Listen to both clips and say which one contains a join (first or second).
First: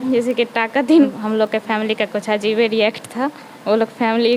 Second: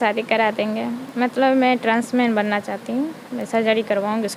first